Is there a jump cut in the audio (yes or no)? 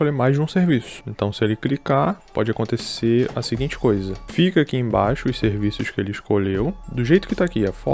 no